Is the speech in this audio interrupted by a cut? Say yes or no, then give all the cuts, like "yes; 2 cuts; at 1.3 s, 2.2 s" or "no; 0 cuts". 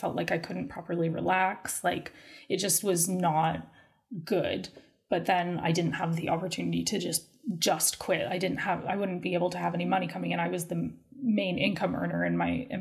no; 0 cuts